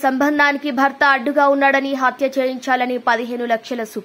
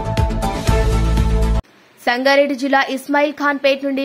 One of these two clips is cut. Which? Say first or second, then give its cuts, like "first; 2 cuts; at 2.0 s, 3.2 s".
second; 1 cut; at 1.5 s